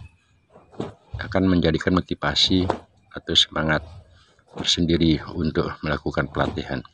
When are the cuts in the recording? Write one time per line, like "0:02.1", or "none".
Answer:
none